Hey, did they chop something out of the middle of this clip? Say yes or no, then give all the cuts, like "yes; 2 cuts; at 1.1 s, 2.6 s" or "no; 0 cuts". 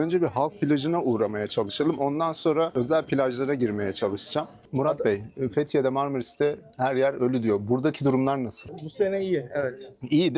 yes; 2 cuts; at 4.7 s, 8.6 s